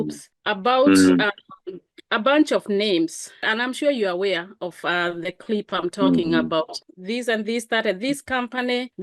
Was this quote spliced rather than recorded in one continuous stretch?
yes; 2 cuts; at 3.4 s, 6.8 s

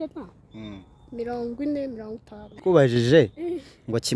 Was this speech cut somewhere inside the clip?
yes; 1 cut; at 2.5 s

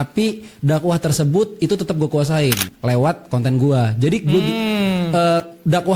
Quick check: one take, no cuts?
no; 1 cut; at 2.7 s

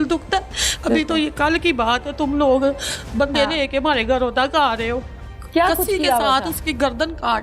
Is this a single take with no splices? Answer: no; 1 cut; at 5.2 s

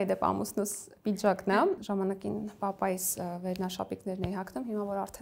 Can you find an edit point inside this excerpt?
yes; 1 cut; at 1.8 s

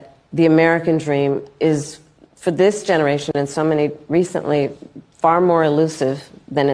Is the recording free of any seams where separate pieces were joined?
yes; 0 cuts

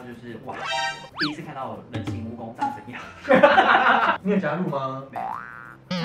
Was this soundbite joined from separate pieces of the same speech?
yes; 2 cuts; at 1.0 s, 4.2 s

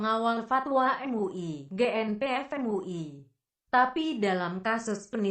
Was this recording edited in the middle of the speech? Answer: yes; 1 cut; at 3.0 s

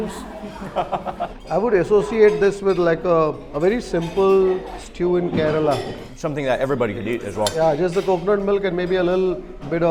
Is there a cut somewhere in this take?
yes; 1 cut; at 1.3 s

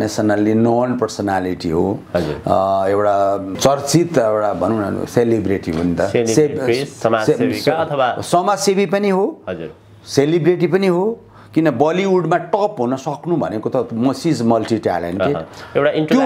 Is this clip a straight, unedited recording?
yes; 0 cuts

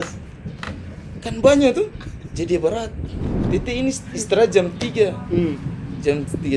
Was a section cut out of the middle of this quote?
yes; 1 cut; at 3.4 s

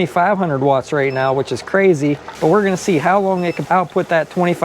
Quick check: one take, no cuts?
no; 2 cuts; at 2.3 s, 3.6 s

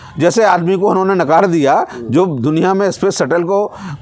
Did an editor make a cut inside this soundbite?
no; 0 cuts

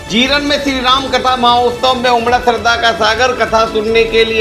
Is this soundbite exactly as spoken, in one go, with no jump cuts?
yes; 0 cuts

